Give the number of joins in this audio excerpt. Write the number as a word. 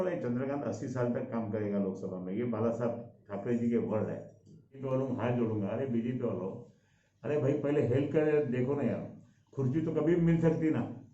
one